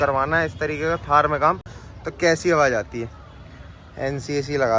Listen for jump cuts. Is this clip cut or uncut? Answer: uncut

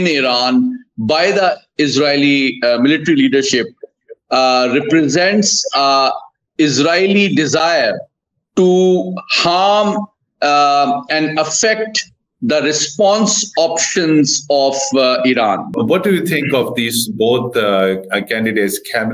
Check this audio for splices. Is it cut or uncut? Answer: cut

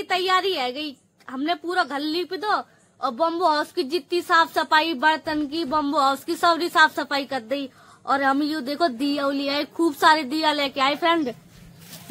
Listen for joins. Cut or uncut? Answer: uncut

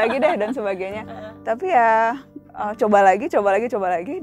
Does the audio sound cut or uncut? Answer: uncut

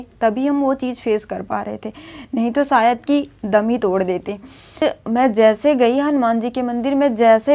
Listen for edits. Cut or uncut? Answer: cut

